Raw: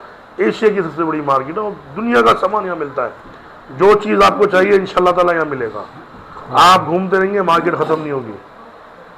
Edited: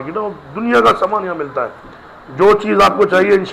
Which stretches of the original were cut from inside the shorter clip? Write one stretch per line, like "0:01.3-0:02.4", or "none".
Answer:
none